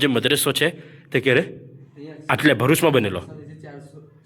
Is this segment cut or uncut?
uncut